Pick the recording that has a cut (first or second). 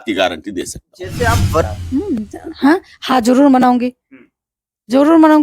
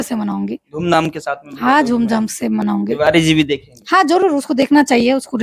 first